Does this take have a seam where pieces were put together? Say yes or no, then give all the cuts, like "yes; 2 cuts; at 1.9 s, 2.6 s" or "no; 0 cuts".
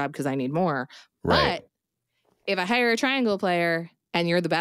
no; 0 cuts